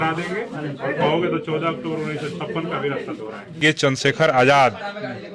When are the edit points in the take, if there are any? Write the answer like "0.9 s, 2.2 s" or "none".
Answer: 3.6 s